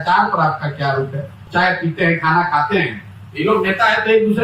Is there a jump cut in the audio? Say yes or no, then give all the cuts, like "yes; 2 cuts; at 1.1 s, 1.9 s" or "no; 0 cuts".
yes; 1 cut; at 1.4 s